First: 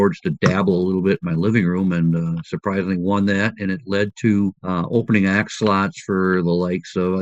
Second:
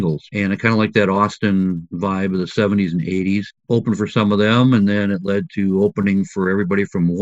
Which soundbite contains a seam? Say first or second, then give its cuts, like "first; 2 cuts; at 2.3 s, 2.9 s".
second; 1 cut; at 3.5 s